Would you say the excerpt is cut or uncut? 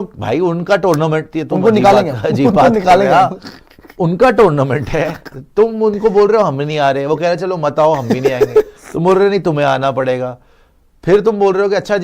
uncut